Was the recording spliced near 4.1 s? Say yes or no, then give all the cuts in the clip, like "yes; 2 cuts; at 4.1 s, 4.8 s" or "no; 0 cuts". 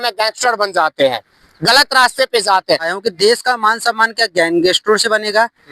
no; 1 cut; at 2.9 s